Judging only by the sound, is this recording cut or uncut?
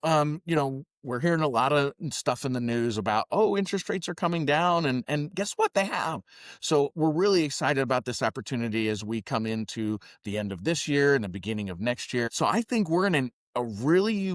cut